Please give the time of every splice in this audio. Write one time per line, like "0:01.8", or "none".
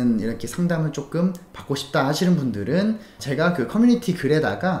0:03.1